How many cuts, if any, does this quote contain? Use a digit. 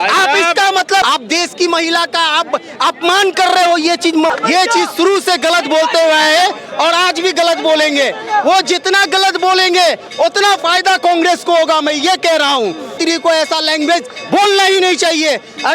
3